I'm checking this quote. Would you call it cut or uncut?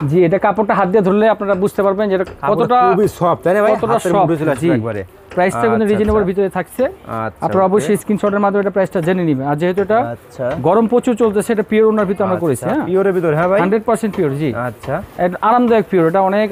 uncut